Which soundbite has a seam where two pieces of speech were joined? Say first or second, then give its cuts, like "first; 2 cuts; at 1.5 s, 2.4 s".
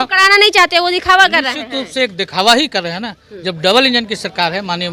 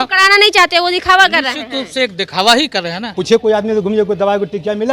second; 1 cut; at 3.1 s